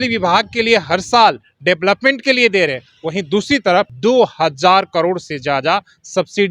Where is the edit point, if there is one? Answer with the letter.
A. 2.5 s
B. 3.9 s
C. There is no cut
B